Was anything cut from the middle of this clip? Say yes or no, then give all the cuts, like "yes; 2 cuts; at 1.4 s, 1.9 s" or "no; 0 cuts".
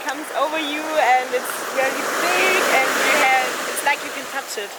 no; 0 cuts